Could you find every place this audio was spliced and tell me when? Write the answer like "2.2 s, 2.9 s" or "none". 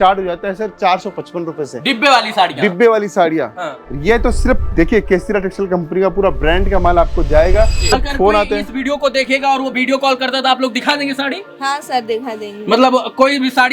7.9 s